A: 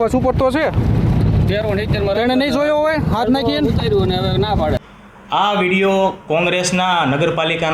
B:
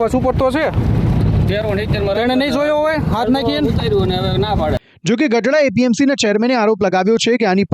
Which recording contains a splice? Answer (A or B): A